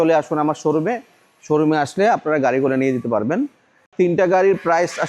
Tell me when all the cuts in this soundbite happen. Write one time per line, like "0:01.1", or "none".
0:03.8